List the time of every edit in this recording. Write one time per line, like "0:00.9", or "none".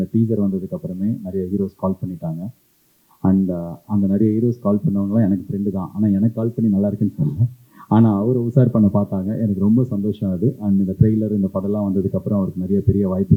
none